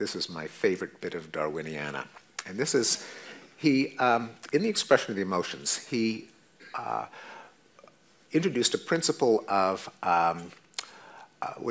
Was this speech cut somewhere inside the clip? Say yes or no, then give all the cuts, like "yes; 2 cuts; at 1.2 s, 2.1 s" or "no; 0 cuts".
yes; 1 cut; at 7.4 s